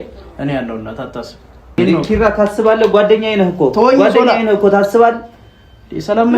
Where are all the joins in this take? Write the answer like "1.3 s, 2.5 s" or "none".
1.8 s